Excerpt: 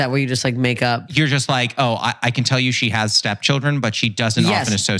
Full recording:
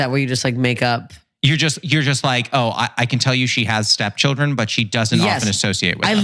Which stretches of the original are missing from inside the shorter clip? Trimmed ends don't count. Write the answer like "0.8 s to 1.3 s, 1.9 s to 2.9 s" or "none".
1.1 s to 1.8 s